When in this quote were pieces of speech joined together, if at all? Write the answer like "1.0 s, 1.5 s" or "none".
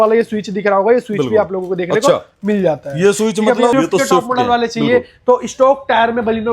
3.7 s

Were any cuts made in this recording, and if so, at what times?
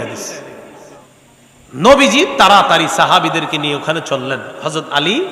1.0 s

